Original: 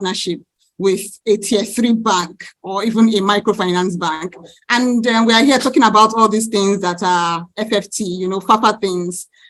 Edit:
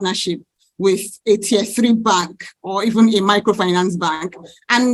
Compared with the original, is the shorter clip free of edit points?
yes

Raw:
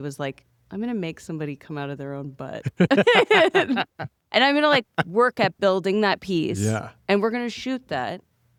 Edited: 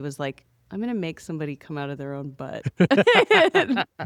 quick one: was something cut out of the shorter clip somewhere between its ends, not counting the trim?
no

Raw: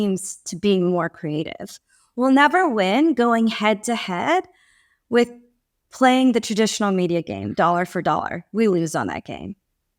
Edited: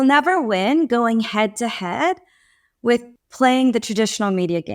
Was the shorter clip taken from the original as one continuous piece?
no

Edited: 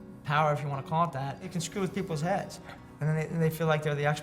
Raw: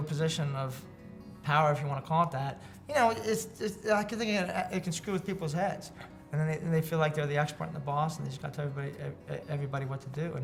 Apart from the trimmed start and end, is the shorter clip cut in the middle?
yes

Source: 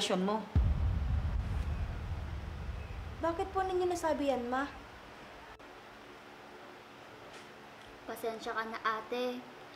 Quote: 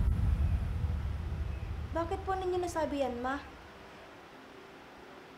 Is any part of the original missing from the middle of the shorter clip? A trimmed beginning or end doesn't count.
yes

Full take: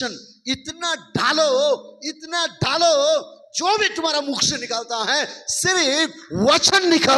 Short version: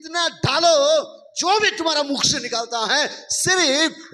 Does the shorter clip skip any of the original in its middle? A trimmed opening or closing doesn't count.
no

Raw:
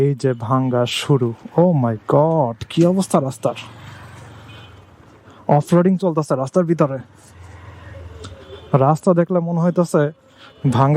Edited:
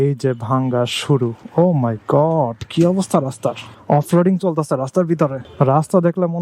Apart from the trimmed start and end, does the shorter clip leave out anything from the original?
yes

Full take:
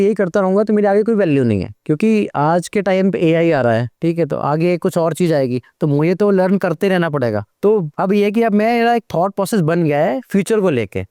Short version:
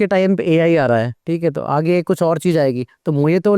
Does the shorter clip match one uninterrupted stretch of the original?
yes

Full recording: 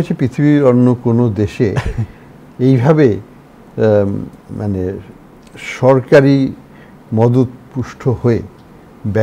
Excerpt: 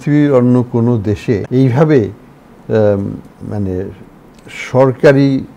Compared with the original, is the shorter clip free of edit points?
no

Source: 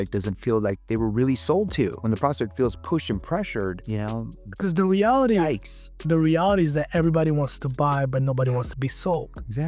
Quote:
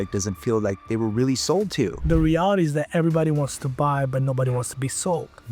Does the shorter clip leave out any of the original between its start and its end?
yes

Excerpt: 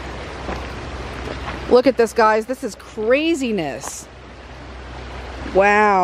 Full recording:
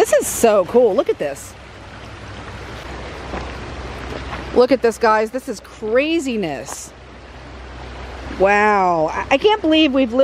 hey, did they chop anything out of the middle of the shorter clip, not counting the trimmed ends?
no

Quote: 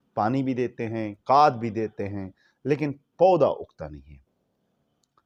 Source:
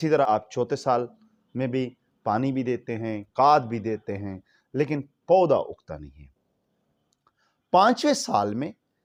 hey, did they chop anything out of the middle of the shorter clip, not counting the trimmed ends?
no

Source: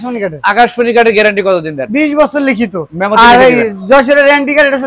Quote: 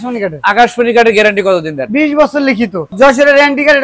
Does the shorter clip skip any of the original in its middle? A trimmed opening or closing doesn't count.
yes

